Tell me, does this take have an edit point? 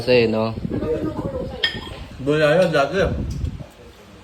no; 0 cuts

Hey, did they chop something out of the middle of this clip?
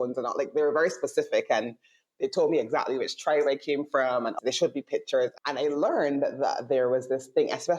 yes; 2 cuts; at 4.3 s, 5.3 s

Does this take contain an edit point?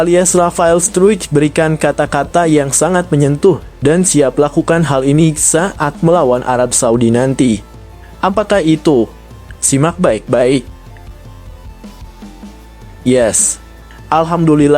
yes; 2 cuts; at 11.3 s, 13.0 s

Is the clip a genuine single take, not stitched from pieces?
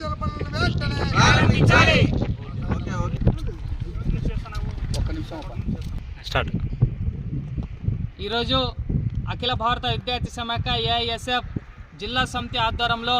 no; 1 cut; at 2.8 s

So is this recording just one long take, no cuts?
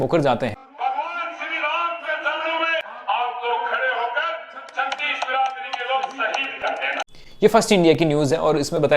no; 1 cut; at 2.9 s

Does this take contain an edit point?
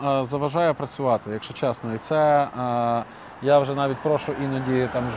no; 0 cuts

